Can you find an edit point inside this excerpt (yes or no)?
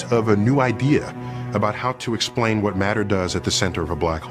no